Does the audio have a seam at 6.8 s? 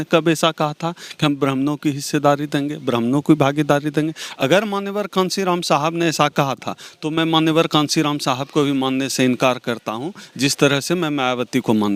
no; 0 cuts

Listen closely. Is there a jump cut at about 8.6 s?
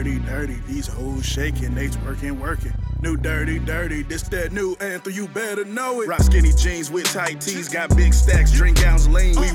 no; 1 cut; at 6.0 s

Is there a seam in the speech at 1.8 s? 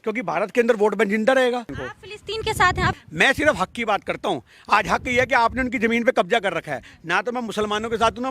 yes; 2 cuts; at 1.8 s, 3.0 s

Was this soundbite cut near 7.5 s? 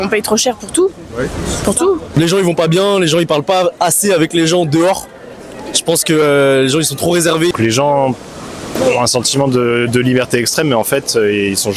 yes; 2 cuts; at 2.2 s, 7.5 s

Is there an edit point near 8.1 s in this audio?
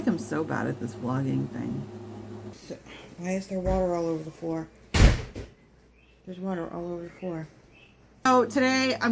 yes; 2 cuts; at 2.6 s, 8.1 s

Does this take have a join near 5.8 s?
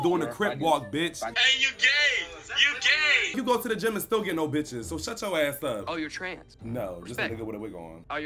yes; 3 cuts; at 1.4 s, 3.4 s, 5.8 s

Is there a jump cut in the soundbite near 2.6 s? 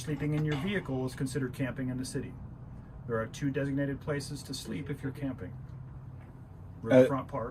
no; 0 cuts

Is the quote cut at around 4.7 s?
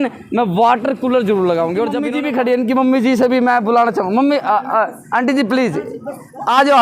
no; 1 cut; at 2.0 s

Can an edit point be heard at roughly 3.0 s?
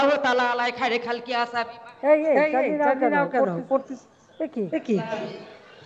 no; 0 cuts

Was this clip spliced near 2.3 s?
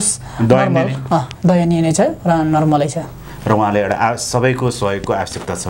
no; 0 cuts

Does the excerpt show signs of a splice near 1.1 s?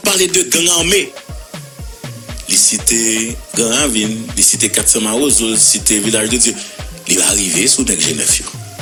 no; 0 cuts

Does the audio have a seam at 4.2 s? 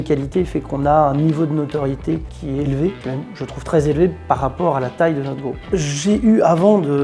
no; 3 cuts; at 2.3 s, 3.0 s, 5.5 s

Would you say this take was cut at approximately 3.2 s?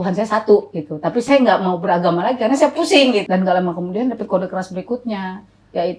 yes; 1 cut; at 3.2 s

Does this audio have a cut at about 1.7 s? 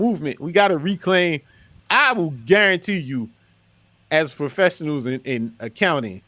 yes; 1 cut; at 1.7 s

